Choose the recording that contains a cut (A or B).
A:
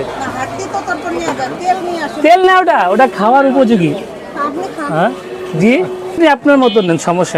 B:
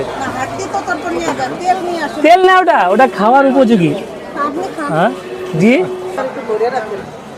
B